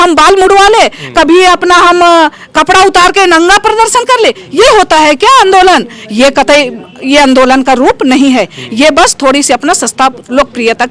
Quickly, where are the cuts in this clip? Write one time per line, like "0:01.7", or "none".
none